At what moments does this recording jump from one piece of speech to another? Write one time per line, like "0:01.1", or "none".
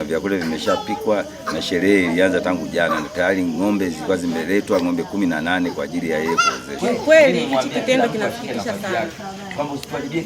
0:06.7